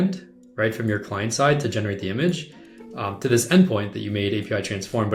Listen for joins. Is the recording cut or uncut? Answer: uncut